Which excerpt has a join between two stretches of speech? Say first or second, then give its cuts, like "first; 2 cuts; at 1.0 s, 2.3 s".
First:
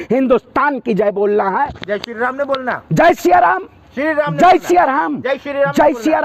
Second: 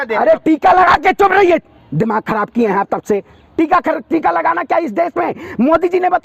first; 1 cut; at 1.8 s